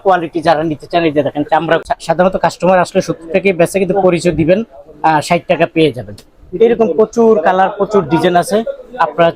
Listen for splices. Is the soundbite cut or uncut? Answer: cut